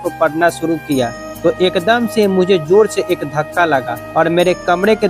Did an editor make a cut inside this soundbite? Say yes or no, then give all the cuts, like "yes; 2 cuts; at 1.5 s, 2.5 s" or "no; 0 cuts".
yes; 2 cuts; at 1.2 s, 4.0 s